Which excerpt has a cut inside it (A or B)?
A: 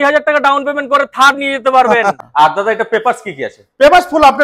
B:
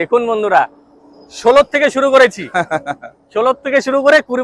A